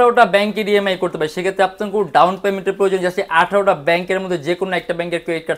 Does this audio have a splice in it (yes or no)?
no